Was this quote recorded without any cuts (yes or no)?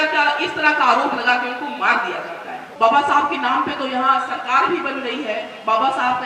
no